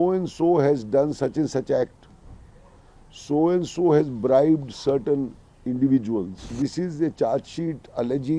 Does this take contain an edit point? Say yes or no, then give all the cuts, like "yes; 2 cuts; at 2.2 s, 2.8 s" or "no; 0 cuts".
yes; 1 cut; at 6.5 s